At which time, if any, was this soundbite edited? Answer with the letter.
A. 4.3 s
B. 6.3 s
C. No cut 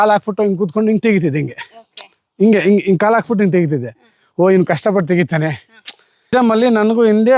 B